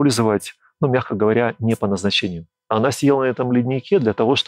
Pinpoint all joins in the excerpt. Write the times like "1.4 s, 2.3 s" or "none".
2.7 s